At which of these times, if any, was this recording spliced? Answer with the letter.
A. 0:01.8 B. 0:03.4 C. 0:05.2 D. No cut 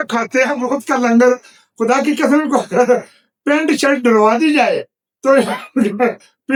D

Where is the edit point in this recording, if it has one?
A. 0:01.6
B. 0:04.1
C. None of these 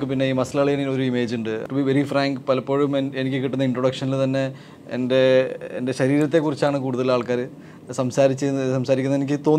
A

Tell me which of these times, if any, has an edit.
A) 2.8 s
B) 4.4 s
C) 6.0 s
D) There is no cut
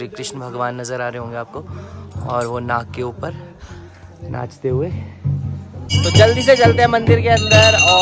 C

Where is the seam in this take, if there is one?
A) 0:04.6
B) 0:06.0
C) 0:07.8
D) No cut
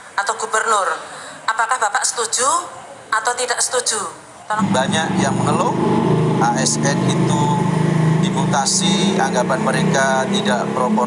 A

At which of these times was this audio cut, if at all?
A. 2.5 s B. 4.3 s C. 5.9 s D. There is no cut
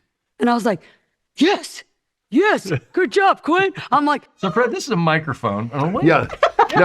B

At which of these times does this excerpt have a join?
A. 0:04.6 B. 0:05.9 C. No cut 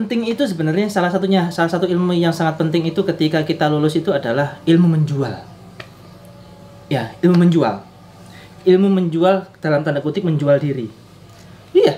C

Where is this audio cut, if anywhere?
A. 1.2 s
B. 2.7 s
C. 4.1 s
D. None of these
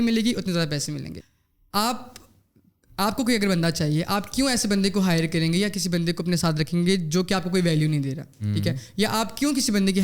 A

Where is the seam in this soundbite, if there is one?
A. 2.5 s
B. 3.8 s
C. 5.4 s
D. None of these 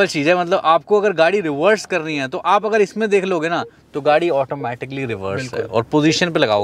D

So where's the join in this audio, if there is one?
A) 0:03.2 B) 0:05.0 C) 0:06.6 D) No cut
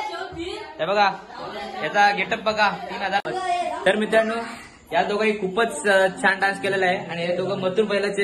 A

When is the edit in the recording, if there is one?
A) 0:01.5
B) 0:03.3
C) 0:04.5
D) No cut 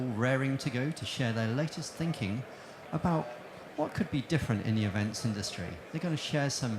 B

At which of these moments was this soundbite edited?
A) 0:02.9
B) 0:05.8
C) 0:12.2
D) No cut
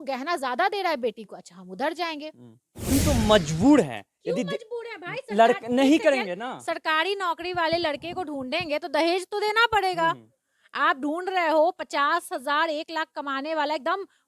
A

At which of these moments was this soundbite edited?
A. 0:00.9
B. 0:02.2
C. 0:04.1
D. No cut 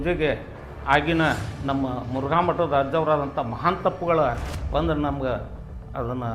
D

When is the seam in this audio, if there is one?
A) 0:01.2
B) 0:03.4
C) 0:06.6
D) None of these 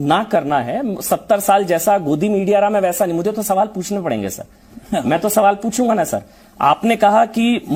D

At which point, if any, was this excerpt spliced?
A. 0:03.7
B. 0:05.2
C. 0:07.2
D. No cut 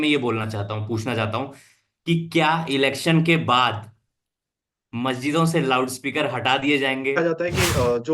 C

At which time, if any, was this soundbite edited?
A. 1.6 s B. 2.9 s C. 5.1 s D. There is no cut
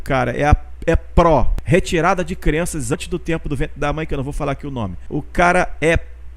A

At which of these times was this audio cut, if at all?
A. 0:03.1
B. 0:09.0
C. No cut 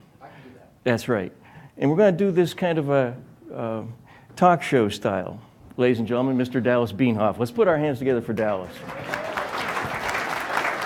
A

